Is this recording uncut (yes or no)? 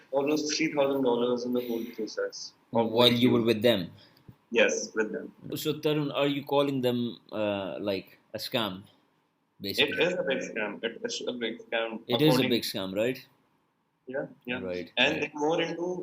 no